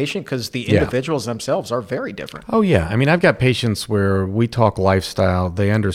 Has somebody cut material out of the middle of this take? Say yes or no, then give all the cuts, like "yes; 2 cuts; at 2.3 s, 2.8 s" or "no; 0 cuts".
no; 0 cuts